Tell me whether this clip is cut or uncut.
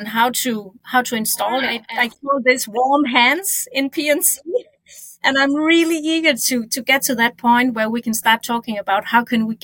cut